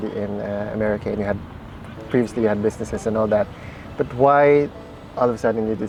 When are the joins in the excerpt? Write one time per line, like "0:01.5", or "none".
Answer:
none